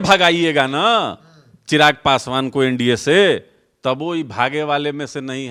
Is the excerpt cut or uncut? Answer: uncut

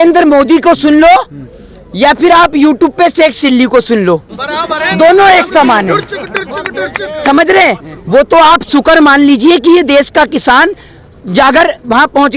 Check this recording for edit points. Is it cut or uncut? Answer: uncut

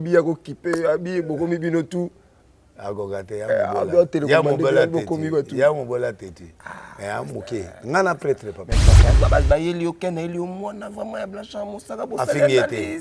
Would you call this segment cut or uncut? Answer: cut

